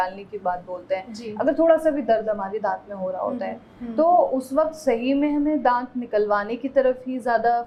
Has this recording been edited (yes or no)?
no